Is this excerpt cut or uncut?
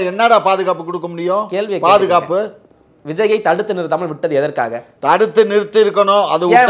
uncut